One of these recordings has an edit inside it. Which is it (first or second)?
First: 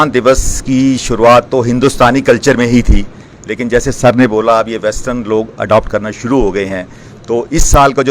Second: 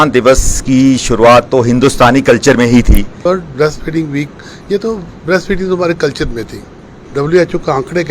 second